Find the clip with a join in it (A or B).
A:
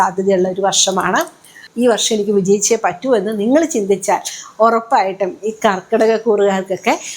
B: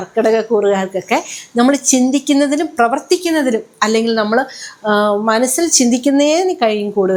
A